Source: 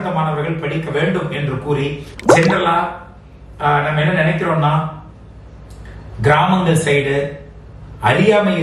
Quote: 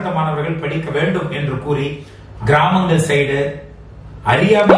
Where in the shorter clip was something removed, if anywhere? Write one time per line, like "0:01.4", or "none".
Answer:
0:02.1